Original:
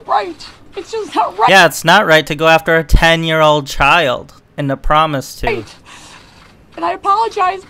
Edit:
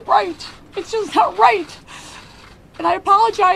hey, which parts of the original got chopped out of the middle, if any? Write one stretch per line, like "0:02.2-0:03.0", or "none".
0:01.5-0:05.5